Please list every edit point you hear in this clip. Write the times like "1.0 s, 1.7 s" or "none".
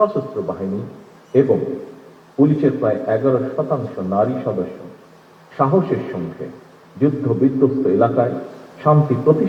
none